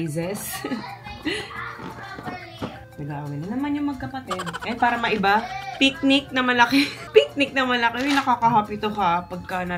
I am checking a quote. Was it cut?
no; 0 cuts

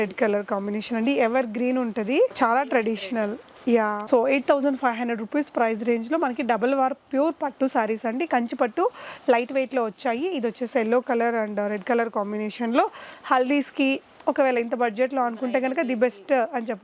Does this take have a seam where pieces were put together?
no; 0 cuts

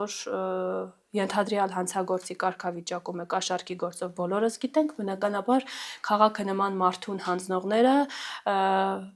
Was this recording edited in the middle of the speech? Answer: no; 0 cuts

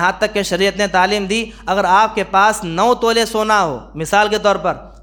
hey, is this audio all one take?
yes; 0 cuts

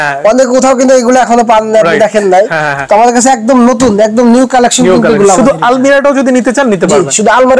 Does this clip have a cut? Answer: no; 0 cuts

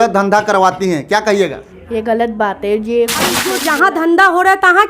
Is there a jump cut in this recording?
yes; 1 cut; at 3.4 s

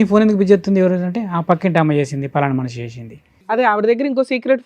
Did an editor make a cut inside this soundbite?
yes; 1 cut; at 3.6 s

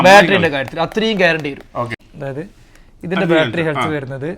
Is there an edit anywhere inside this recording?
yes; 1 cut; at 2.0 s

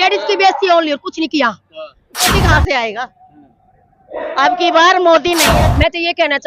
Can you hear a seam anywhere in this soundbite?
yes; 2 cuts; at 2.4 s, 5.4 s

